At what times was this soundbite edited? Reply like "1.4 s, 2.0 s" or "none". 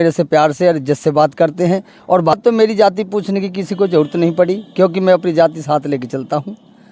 2.3 s

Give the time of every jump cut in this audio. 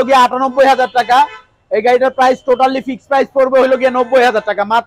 none

